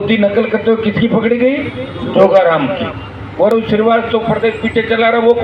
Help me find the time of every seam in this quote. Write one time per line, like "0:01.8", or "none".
none